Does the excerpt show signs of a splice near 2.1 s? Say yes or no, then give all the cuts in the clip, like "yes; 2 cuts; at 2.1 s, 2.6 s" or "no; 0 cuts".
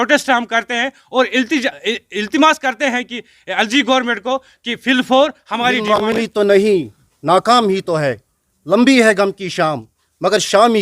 no; 1 cut; at 6.2 s